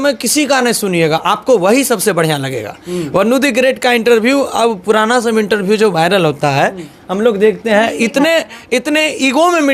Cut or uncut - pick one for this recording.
uncut